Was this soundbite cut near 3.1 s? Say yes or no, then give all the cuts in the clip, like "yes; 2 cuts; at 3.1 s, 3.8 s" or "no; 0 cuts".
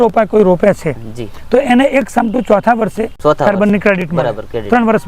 yes; 1 cut; at 3.1 s